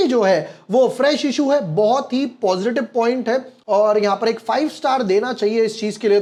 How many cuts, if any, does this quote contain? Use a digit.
0